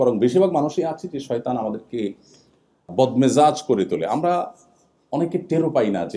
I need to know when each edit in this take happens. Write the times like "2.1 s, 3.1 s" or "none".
2.9 s